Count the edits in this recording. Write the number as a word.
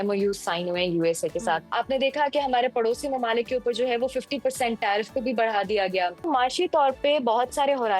two